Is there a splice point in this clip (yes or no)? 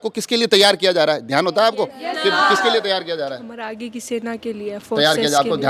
no